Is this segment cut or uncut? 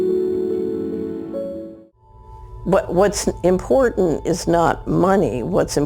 cut